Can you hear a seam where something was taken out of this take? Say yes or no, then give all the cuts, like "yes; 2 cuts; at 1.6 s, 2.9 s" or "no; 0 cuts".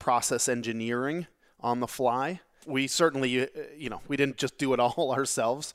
yes; 1 cut; at 2.6 s